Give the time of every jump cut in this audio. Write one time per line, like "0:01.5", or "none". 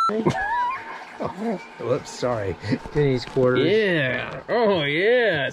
0:02.9